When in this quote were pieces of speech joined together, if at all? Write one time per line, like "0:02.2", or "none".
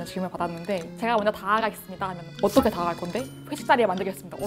0:00.9